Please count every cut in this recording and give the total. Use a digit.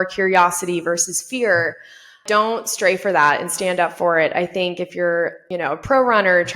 2